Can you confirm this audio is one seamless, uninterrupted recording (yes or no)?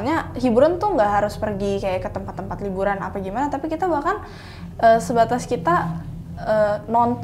yes